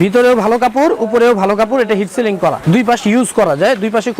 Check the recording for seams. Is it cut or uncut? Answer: cut